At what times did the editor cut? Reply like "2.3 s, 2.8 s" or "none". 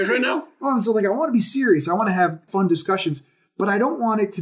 2.5 s